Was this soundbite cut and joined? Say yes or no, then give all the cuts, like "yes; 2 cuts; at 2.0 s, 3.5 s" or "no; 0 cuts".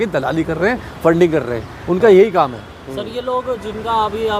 no; 0 cuts